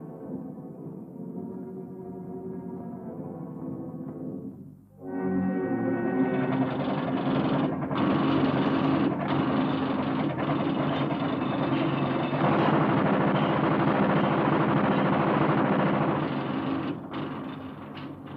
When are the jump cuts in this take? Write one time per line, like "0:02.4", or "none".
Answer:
0:16.4